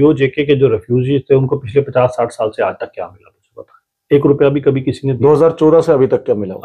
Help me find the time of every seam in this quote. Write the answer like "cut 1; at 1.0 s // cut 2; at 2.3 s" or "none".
none